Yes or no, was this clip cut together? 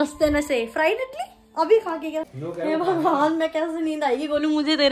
yes